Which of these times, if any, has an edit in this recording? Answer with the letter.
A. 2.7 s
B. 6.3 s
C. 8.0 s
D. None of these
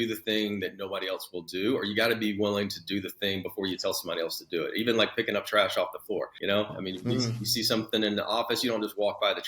B